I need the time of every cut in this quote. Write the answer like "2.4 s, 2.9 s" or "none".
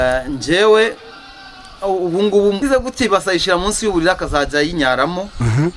2.6 s